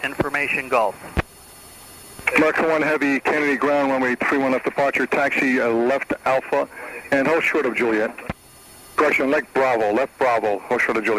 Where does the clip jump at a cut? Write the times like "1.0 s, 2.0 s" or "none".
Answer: 6.2 s